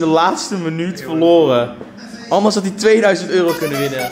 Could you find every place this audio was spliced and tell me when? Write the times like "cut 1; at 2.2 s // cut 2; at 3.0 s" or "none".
none